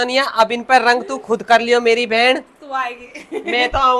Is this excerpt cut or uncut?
uncut